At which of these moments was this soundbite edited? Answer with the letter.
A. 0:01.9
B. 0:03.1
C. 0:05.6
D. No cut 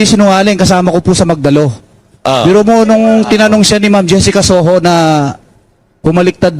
D